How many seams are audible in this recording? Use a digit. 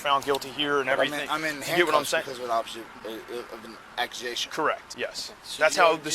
1